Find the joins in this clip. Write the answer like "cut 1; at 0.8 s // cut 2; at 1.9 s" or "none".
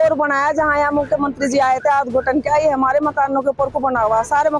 none